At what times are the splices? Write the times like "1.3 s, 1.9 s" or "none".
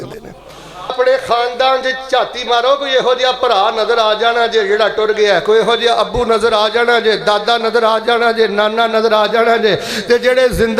0.9 s